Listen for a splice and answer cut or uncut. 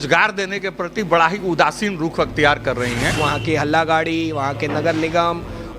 cut